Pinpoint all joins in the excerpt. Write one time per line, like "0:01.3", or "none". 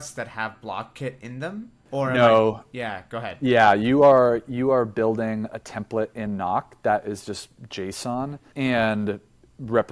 0:01.8
0:08.4